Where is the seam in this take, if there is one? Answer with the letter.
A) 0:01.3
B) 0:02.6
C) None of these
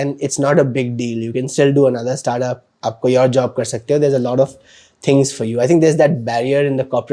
C